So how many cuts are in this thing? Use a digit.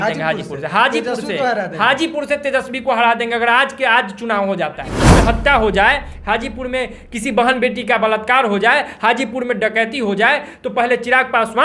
1